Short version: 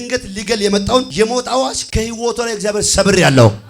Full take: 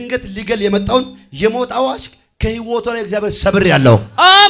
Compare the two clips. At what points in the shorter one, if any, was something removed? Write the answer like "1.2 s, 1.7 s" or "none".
1.1 s, 1.8 s